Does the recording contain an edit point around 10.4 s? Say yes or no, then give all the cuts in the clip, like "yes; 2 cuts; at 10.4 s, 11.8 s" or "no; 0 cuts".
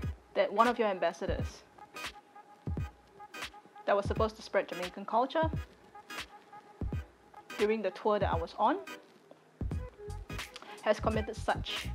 yes; 4 cuts; at 5.5 s, 7.5 s, 8.8 s, 10.4 s